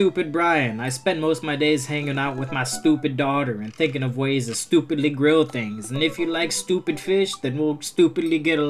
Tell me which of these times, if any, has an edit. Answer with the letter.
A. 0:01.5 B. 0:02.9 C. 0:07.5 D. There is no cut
D